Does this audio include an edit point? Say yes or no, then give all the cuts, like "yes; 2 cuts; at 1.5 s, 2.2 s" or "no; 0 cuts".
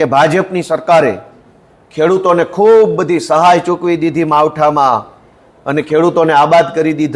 no; 0 cuts